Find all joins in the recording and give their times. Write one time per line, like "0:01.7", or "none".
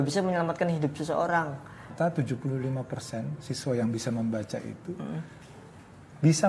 0:01.9